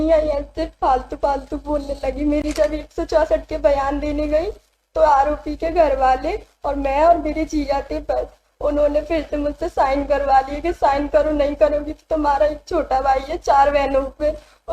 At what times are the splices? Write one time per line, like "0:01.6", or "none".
0:02.4